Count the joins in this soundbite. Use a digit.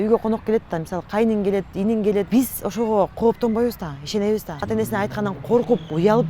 2